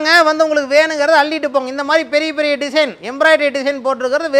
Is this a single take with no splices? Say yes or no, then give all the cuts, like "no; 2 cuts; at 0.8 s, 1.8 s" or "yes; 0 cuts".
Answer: yes; 0 cuts